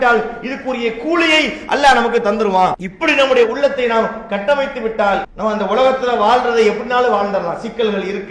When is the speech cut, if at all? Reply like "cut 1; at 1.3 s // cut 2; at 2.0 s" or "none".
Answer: cut 1; at 2.9 s // cut 2; at 5.3 s